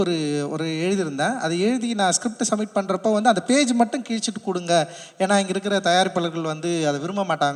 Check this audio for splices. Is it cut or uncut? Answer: uncut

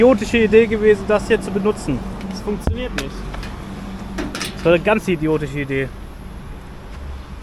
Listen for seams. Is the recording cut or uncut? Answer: uncut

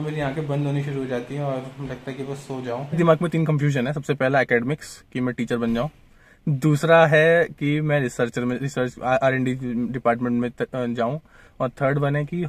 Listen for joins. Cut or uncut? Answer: cut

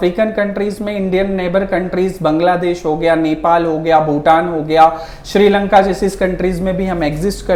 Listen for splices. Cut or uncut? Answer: uncut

